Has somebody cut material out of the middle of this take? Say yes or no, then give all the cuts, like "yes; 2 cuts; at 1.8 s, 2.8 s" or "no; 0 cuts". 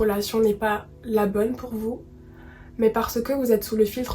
no; 0 cuts